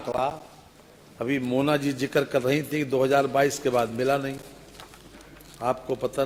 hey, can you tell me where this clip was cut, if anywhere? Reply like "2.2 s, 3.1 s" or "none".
none

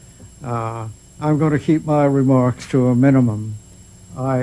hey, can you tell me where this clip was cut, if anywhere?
1.2 s

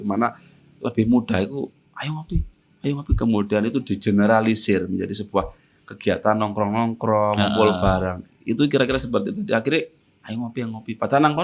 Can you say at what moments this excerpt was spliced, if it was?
none

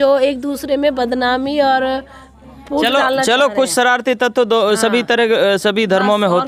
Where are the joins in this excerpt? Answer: none

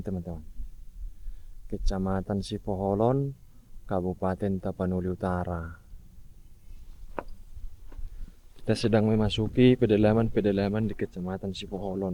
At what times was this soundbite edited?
none

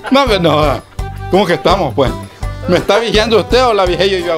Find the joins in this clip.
none

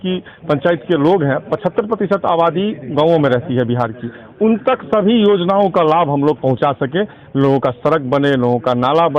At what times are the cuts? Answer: none

